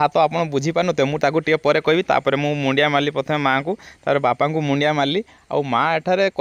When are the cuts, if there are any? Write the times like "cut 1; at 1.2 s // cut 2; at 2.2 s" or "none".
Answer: none